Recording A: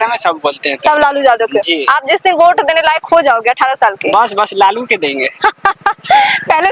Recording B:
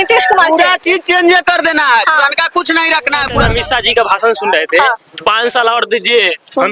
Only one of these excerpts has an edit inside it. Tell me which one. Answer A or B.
B